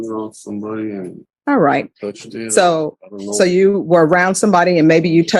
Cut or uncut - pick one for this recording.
cut